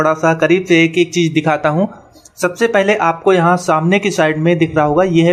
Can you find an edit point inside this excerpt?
no; 0 cuts

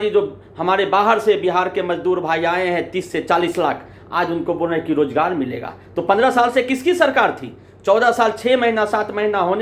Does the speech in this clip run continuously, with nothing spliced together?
yes; 0 cuts

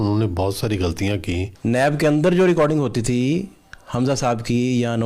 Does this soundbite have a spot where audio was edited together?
yes; 1 cut; at 1.5 s

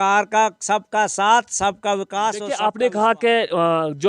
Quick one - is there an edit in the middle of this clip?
yes; 1 cut; at 2.5 s

